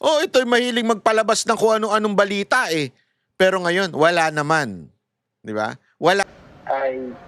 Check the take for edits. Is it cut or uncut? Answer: cut